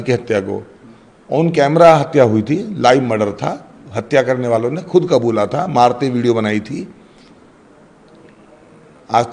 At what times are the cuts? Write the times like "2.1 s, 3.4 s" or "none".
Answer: none